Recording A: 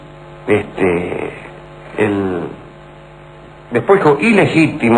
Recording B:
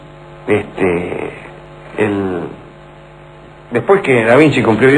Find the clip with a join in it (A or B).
B